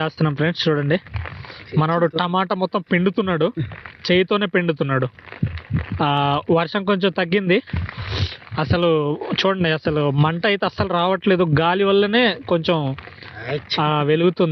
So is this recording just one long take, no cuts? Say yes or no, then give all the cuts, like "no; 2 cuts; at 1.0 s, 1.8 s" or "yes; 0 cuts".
yes; 0 cuts